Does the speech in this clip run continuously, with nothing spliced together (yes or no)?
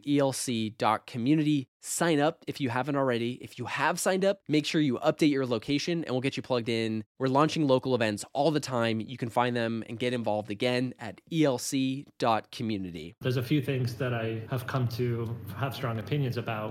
no